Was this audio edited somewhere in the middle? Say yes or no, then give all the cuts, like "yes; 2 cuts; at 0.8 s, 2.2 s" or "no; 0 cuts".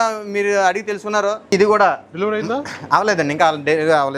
yes; 1 cut; at 1.5 s